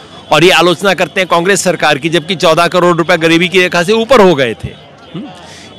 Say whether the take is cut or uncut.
uncut